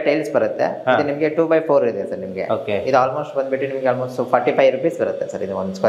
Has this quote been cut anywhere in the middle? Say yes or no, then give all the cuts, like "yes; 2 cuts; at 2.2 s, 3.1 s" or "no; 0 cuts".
no; 0 cuts